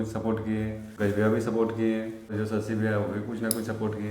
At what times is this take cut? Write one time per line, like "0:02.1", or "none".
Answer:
0:00.9
0:02.3